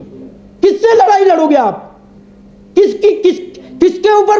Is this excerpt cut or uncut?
uncut